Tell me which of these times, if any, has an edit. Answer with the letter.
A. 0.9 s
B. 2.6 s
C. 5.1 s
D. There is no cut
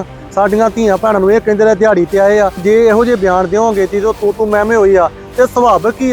B